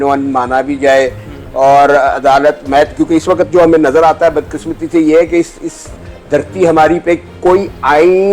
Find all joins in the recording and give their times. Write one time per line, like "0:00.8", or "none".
none